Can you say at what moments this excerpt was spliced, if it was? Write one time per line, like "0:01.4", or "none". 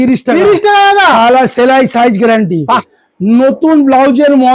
0:02.8